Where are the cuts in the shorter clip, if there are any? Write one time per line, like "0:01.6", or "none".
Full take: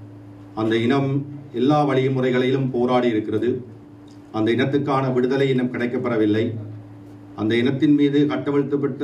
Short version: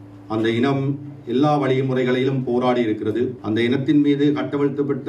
0:03.4